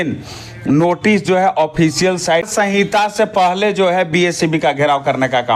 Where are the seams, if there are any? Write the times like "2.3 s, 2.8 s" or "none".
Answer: 2.5 s